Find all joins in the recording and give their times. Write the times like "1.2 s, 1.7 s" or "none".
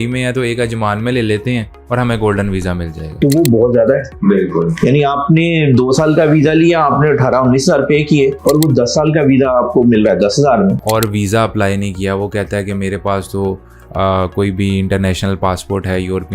3.2 s, 10.8 s